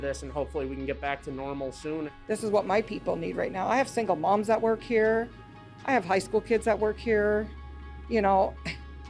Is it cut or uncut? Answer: cut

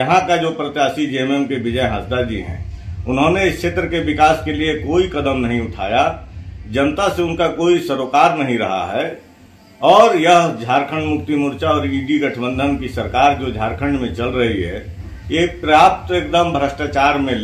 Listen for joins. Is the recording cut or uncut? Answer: uncut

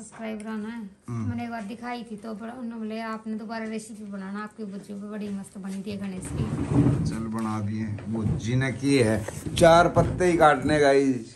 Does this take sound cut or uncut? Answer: uncut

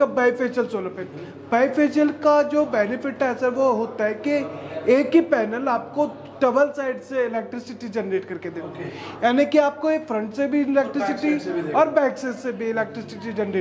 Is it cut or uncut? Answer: uncut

